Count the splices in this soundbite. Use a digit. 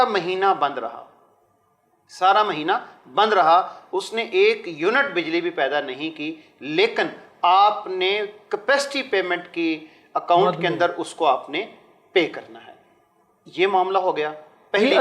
0